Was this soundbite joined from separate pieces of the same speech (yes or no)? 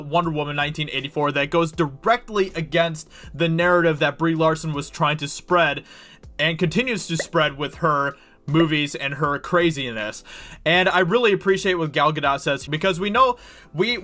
yes